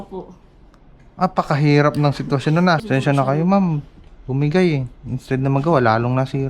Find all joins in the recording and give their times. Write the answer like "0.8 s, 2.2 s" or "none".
2.8 s

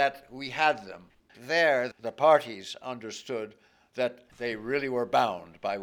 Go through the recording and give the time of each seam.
1.3 s, 4.3 s

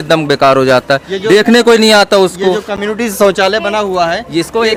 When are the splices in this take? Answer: none

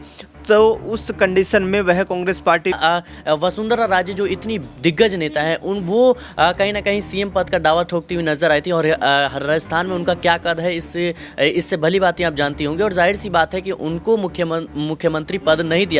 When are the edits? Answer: 2.8 s

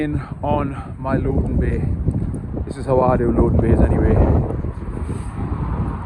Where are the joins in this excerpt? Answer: none

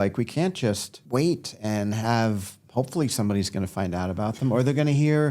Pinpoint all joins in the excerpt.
0.9 s

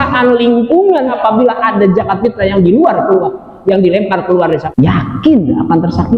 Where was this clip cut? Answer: 1.1 s, 4.7 s

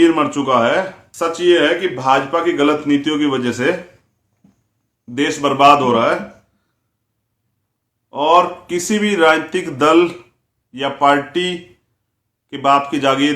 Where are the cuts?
1.0 s

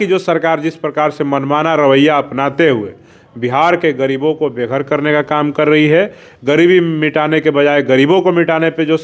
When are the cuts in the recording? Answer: none

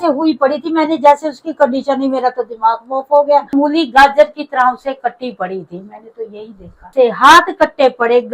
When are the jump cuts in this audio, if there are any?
3.5 s, 6.9 s

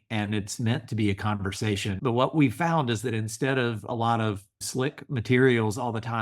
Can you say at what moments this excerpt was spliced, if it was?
2.0 s, 4.6 s

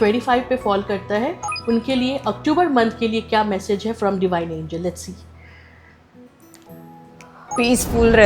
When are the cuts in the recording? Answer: none

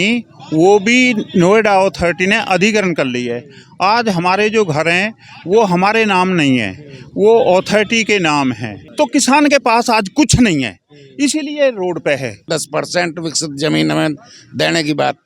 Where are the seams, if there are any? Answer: 8.8 s, 12.5 s

